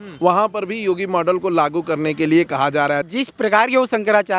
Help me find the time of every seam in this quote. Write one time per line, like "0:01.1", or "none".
0:03.1